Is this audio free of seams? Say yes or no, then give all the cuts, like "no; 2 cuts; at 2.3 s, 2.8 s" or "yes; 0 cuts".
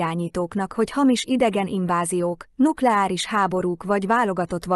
yes; 0 cuts